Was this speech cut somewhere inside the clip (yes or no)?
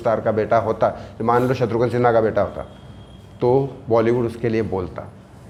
no